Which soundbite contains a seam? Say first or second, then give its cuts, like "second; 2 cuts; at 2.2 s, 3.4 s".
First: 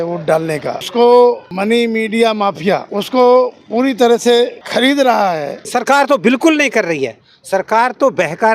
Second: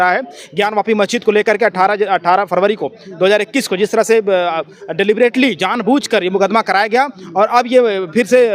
first; 5 cuts; at 0.8 s, 1.5 s, 2.9 s, 4.6 s, 5.6 s